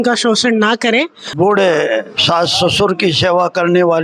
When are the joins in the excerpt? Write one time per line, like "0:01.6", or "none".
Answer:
0:01.2